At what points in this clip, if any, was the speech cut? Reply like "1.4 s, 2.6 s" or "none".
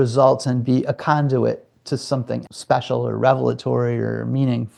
none